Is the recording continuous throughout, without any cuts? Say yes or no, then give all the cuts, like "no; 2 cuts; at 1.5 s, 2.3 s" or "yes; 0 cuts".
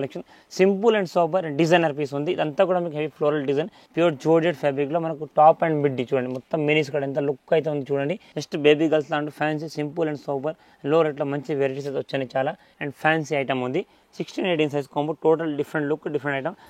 no; 3 cuts; at 3.8 s, 8.3 s, 12.7 s